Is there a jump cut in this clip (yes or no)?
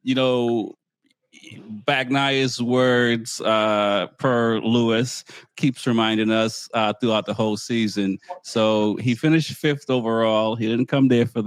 no